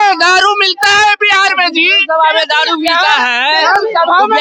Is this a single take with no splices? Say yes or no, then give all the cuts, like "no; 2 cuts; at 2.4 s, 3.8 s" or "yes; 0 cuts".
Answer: yes; 0 cuts